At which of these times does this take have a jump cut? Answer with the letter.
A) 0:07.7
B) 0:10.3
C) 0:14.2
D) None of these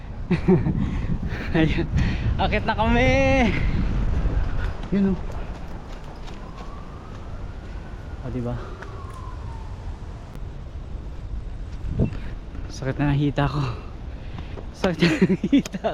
B